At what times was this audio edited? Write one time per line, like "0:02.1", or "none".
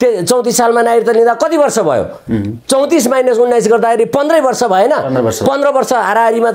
none